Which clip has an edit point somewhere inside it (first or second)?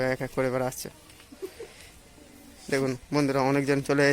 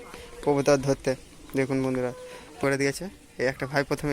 second